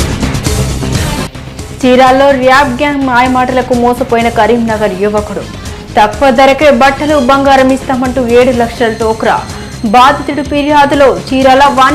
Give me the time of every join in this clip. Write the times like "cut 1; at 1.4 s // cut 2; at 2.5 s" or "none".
cut 1; at 1.2 s